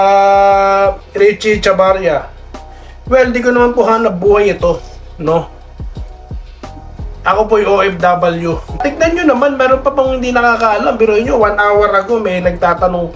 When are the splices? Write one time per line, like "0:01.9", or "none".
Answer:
0:08.8

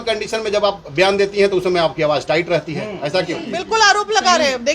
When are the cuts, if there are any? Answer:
0:03.5

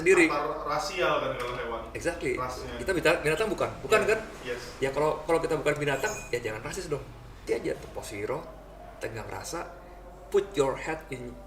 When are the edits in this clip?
0:07.5

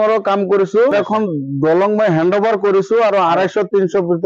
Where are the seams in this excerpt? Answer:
0:00.9

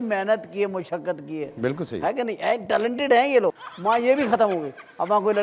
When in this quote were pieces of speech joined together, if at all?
0:03.6

